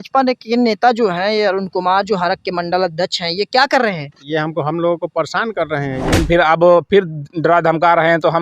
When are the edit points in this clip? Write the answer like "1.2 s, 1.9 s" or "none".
6.2 s

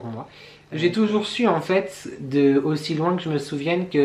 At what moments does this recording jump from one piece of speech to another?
none

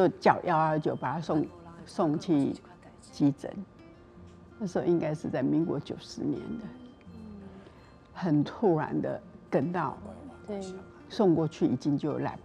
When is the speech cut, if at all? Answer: 10.8 s

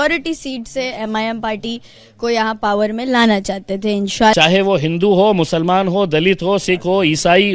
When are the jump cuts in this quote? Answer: 4.3 s

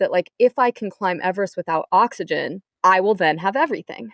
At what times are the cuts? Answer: 2.6 s

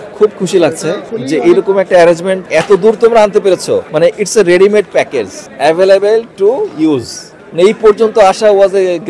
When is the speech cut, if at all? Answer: 1.1 s, 2.4 s, 3.9 s, 5.4 s

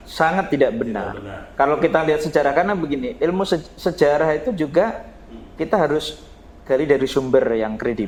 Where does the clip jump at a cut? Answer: none

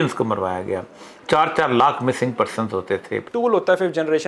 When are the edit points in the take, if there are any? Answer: 3.2 s

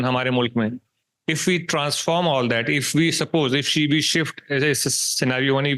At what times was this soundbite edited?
none

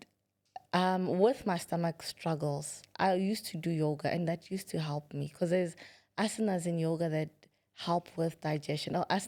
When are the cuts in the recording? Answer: none

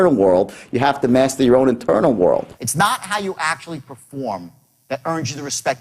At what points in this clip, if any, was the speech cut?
2.6 s

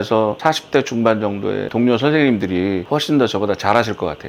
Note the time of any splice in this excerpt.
1.7 s

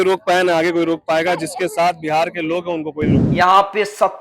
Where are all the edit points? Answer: 3.2 s

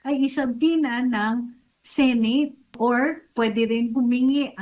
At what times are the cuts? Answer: 2.7 s

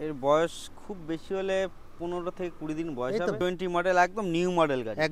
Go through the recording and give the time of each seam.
3.4 s

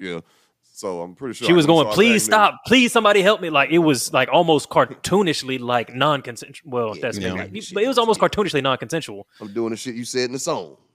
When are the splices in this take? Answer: none

